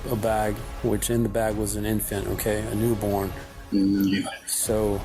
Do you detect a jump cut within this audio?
no; 0 cuts

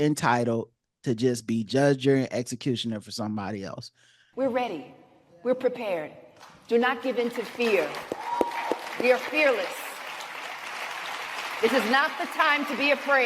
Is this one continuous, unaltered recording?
no; 1 cut; at 4.2 s

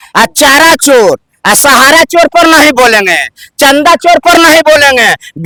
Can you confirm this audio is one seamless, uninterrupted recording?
yes; 0 cuts

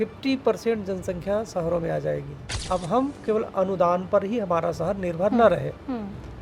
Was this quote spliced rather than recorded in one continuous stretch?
yes; 1 cut; at 2.5 s

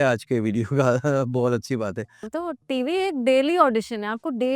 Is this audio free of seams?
no; 1 cut; at 2.3 s

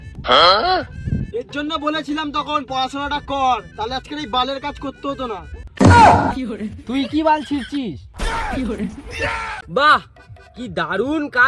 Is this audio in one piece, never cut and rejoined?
no; 1 cut; at 9.6 s

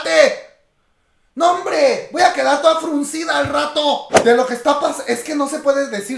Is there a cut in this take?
yes; 1 cut; at 4.1 s

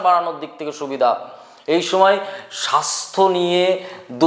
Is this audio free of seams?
yes; 0 cuts

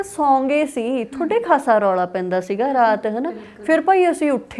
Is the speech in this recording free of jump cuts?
yes; 0 cuts

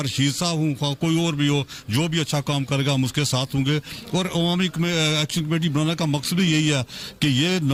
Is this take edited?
no; 0 cuts

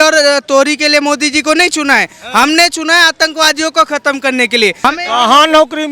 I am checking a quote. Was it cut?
yes; 1 cut; at 4.8 s

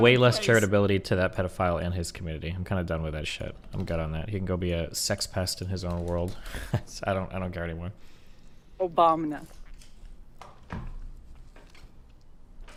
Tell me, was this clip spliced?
no; 0 cuts

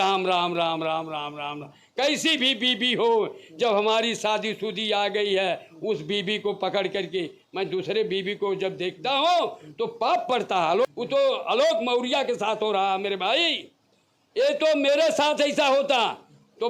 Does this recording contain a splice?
yes; 1 cut; at 10.9 s

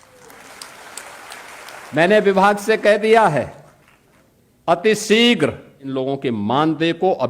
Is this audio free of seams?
no; 2 cuts; at 1.9 s, 5.8 s

